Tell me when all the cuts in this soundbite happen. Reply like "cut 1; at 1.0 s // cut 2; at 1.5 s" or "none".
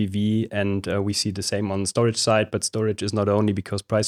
none

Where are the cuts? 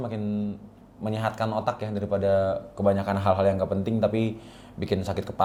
none

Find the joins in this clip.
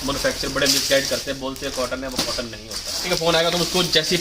cut 1; at 3.0 s

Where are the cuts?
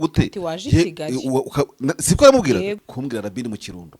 cut 1; at 2.9 s

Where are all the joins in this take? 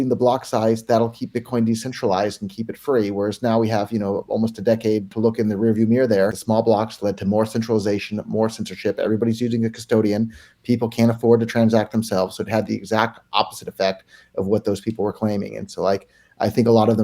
cut 1; at 5.1 s // cut 2; at 6.4 s

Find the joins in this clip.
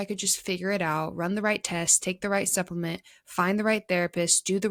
none

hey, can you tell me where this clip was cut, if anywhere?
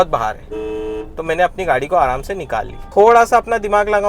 cut 1; at 2.8 s

